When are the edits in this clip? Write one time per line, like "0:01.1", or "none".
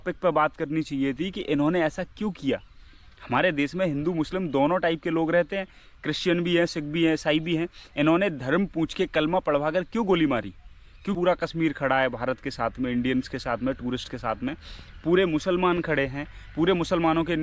0:11.0